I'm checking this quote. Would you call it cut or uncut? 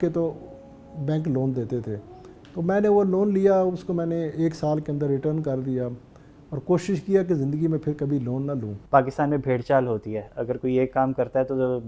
cut